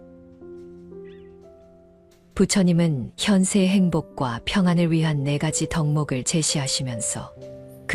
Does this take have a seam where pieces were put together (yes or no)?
yes